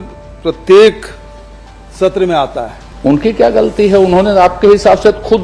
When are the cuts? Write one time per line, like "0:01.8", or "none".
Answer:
0:02.8